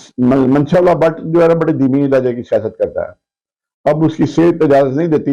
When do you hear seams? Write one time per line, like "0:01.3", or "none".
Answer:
none